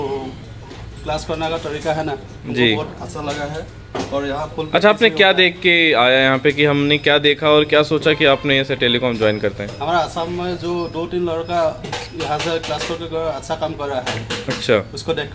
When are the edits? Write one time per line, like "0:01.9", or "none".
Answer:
none